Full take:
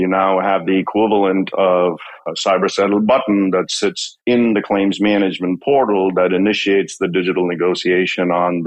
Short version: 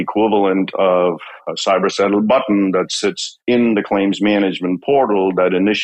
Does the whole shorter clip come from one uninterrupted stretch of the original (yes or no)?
yes